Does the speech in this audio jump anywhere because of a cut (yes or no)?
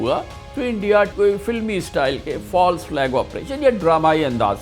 yes